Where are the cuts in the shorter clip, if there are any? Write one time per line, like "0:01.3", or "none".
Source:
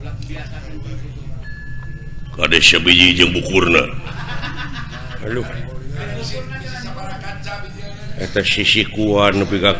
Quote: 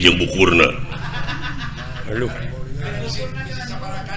none